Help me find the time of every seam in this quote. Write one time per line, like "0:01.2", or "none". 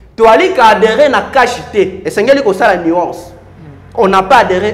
none